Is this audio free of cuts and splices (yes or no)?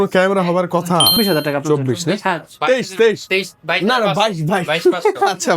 no